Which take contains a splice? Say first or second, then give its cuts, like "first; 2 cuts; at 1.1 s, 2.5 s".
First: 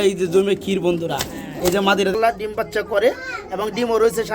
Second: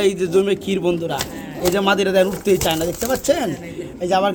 first; 1 cut; at 2.1 s